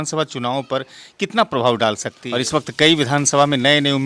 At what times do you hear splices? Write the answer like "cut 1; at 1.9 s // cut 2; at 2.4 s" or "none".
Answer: cut 1; at 2.1 s